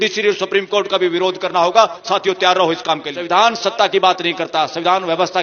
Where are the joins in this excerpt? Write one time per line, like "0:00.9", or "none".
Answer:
0:03.1